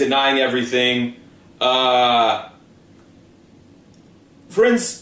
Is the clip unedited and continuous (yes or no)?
no